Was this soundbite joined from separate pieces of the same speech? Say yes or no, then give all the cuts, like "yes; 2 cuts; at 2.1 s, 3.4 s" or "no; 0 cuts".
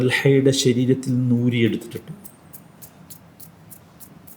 no; 0 cuts